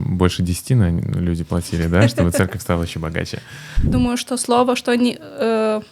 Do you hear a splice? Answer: yes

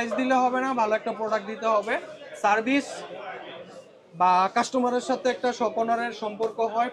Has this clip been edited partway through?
no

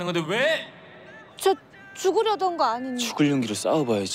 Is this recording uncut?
yes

